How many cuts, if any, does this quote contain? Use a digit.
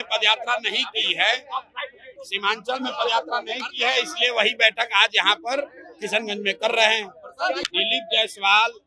1